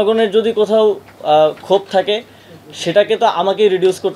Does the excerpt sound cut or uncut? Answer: uncut